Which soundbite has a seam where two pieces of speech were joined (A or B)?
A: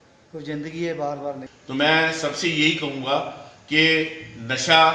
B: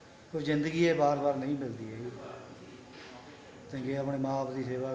A